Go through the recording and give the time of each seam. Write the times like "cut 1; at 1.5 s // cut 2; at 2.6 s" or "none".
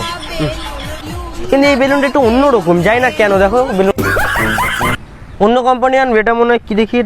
cut 1; at 1.0 s // cut 2; at 5.0 s